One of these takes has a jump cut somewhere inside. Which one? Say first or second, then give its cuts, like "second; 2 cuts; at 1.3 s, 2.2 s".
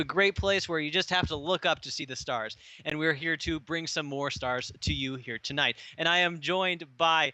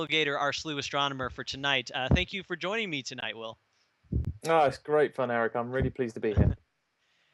first; 1 cut; at 3.9 s